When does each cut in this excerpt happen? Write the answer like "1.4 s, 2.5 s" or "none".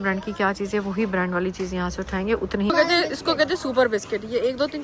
2.7 s